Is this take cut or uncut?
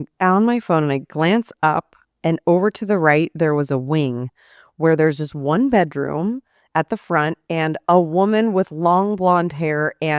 uncut